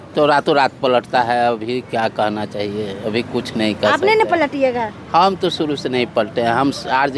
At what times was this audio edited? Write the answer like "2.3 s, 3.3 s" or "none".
none